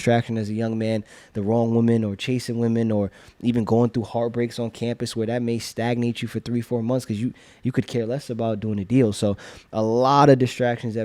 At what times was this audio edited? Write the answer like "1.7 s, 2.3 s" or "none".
none